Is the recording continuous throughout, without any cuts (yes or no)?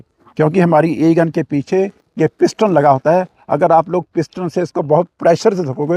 yes